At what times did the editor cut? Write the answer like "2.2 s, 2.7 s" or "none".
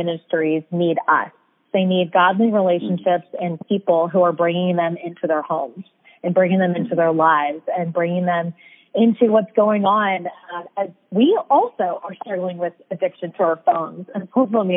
1.6 s